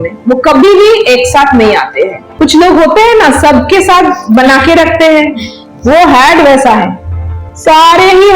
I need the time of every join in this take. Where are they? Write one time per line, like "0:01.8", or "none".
0:02.3